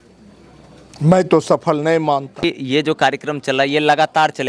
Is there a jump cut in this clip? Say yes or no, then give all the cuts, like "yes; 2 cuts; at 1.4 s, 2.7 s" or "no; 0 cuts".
yes; 1 cut; at 2.4 s